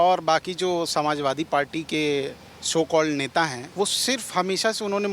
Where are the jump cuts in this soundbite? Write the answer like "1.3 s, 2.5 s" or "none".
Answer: 3.6 s